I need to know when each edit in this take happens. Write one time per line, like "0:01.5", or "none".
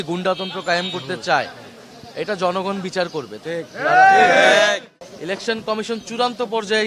0:04.9